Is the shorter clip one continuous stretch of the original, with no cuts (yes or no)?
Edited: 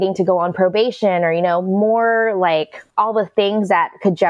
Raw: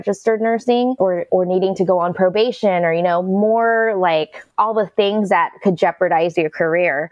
yes